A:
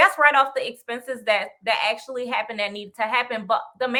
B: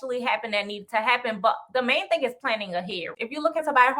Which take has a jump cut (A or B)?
B